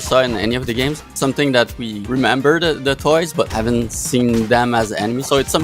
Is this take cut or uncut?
cut